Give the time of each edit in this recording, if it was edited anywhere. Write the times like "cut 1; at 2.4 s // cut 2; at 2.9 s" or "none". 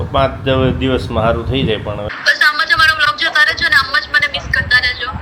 cut 1; at 2.1 s